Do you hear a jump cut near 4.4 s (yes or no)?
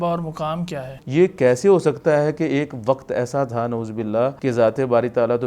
yes